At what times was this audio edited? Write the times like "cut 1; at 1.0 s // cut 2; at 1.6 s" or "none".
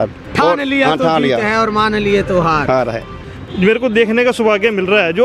cut 1; at 3.2 s